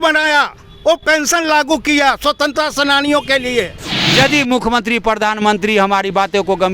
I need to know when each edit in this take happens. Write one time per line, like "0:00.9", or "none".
0:04.0